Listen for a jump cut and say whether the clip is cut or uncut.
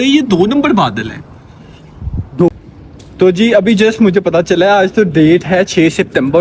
cut